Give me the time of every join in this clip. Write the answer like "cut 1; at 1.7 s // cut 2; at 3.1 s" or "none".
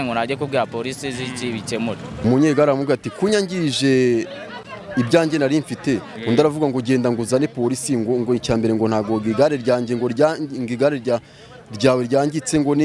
cut 1; at 2.2 s